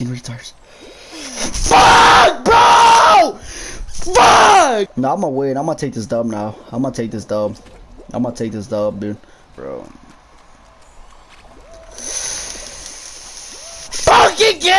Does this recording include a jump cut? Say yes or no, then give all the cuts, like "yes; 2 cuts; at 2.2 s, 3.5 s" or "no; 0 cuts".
yes; 1 cut; at 4.8 s